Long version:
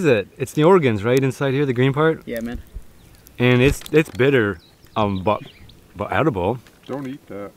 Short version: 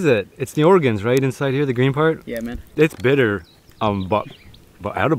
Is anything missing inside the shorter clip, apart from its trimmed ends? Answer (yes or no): yes